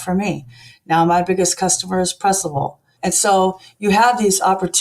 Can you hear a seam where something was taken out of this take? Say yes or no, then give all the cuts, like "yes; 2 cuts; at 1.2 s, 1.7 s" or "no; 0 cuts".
yes; 1 cut; at 2.9 s